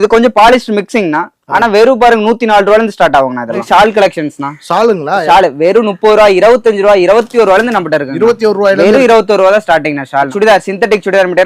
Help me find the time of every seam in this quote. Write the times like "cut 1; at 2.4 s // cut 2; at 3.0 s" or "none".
cut 1; at 3.6 s // cut 2; at 10.3 s